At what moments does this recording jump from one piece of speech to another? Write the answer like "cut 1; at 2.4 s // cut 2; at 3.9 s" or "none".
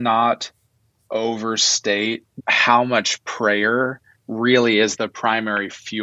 none